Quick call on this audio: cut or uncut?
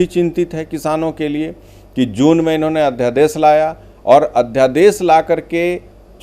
uncut